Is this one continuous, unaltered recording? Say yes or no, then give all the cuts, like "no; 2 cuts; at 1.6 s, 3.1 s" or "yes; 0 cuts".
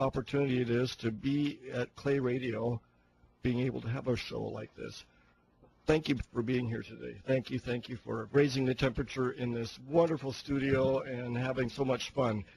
no; 1 cut; at 1.9 s